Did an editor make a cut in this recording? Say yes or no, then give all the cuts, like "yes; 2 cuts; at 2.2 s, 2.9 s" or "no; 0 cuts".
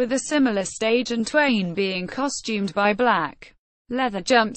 no; 0 cuts